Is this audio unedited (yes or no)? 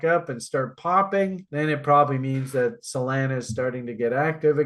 yes